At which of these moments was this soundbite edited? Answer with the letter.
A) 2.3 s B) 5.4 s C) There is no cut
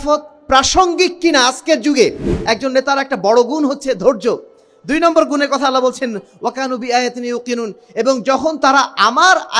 A